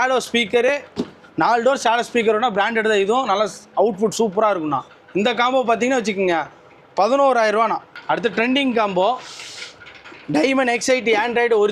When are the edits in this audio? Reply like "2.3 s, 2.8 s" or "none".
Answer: none